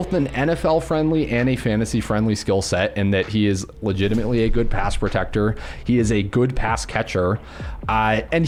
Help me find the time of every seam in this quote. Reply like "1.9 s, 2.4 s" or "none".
none